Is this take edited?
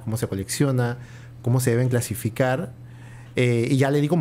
no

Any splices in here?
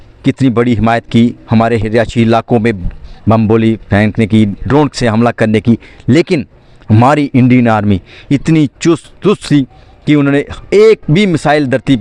no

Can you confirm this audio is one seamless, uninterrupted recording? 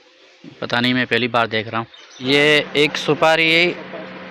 no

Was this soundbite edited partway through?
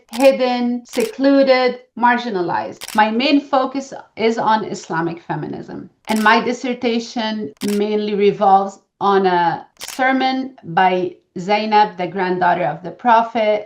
yes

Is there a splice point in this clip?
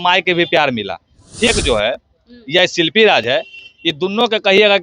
yes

